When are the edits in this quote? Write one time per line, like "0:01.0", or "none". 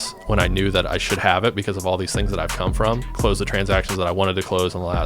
0:03.1